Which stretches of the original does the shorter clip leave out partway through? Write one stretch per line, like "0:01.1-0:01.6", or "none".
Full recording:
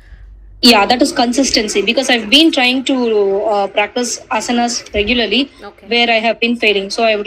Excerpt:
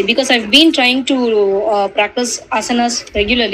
none